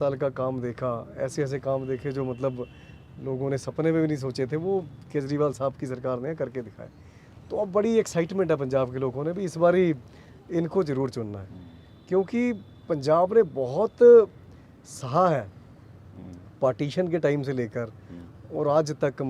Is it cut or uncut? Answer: uncut